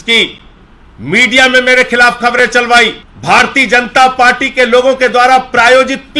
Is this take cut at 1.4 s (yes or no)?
no